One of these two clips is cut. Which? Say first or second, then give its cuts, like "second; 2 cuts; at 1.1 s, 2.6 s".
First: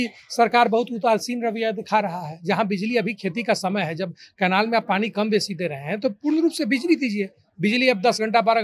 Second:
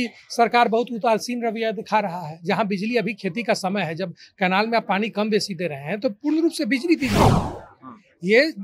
second; 1 cut; at 7.4 s